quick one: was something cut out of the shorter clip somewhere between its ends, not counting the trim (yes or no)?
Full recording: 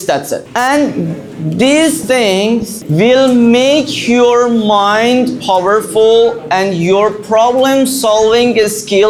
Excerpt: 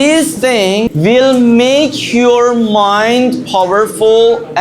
yes